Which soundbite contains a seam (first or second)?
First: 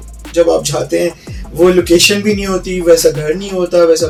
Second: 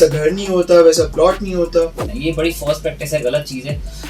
second